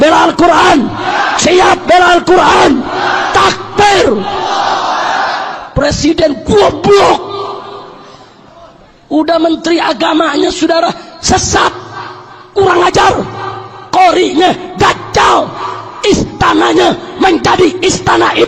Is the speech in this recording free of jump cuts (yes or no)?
yes